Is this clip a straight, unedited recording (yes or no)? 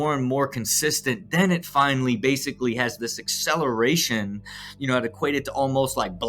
yes